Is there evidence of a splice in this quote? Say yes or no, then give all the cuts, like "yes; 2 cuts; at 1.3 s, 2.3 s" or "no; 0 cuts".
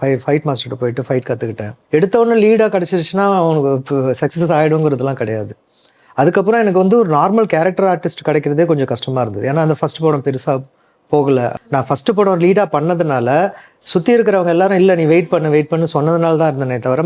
yes; 2 cuts; at 1.7 s, 11.6 s